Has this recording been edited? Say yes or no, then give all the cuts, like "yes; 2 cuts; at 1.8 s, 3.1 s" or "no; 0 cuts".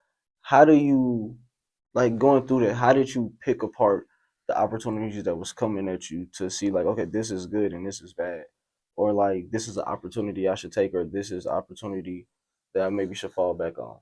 no; 0 cuts